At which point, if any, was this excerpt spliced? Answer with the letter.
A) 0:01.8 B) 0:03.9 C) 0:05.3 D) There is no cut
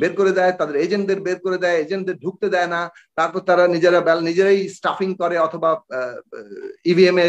D